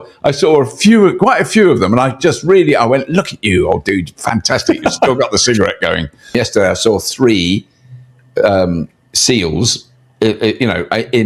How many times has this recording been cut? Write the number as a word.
one